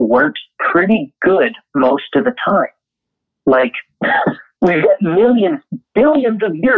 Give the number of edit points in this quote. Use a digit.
1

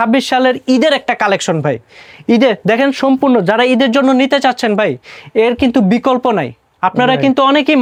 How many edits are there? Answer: 0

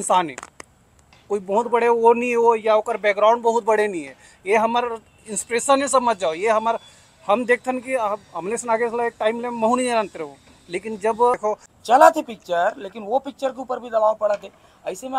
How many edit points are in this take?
1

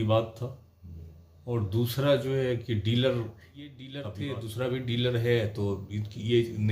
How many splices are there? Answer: 1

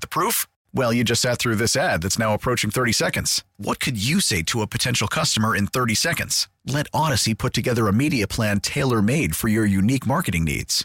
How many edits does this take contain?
0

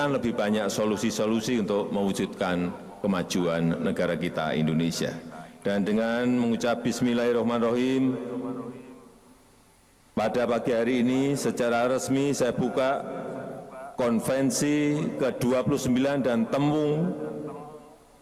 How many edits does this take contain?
0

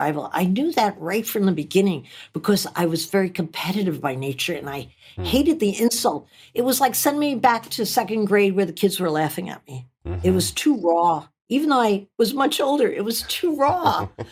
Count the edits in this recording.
0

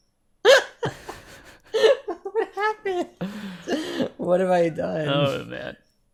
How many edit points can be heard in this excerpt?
0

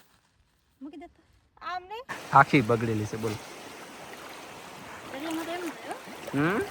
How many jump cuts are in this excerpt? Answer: 1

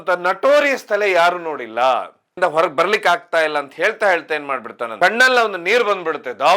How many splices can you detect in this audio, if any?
1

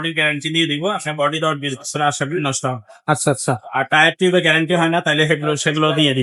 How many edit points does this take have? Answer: 0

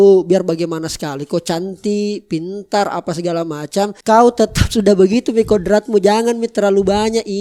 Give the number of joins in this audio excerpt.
1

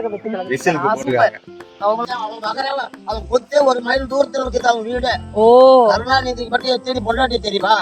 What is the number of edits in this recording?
1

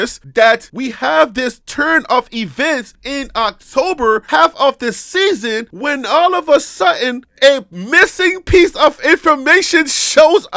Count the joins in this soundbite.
0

